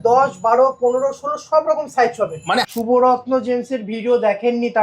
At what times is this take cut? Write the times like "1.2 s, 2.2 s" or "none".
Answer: 2.7 s